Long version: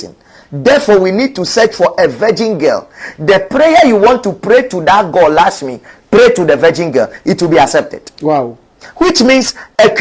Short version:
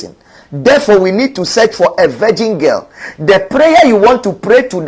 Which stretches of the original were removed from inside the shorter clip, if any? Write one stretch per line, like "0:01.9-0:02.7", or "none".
none